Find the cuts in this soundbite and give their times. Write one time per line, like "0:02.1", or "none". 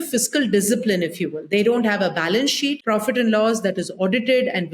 0:02.8